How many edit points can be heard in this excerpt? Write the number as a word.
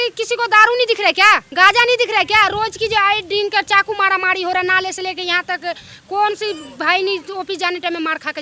one